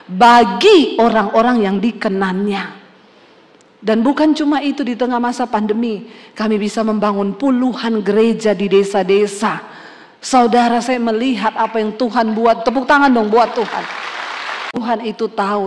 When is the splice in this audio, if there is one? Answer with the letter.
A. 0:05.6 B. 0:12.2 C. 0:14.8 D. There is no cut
C